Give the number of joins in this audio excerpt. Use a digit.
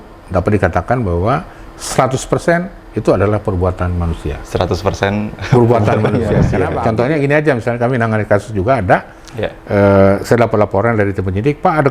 1